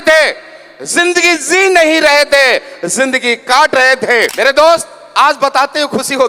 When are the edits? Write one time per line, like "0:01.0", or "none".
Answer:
0:04.3